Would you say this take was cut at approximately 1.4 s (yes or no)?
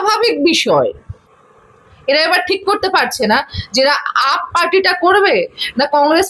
yes